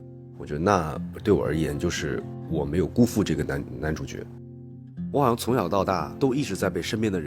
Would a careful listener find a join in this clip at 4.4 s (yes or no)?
yes